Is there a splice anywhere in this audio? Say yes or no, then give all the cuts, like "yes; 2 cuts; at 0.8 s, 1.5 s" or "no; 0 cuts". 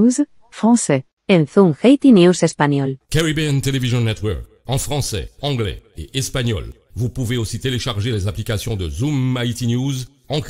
yes; 2 cuts; at 1.2 s, 2.8 s